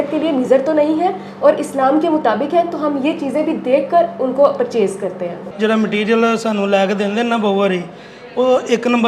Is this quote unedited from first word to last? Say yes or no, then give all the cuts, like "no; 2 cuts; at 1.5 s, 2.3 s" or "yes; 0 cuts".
no; 1 cut; at 5.5 s